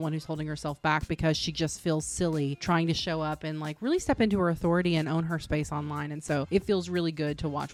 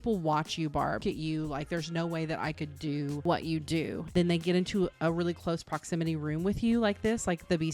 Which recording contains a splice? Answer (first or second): second